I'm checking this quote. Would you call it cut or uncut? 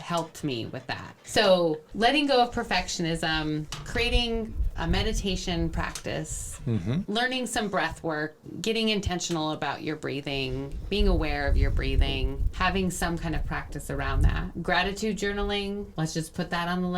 cut